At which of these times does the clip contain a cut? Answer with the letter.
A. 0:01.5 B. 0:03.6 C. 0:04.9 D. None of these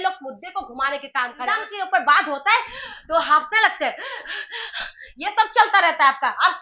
A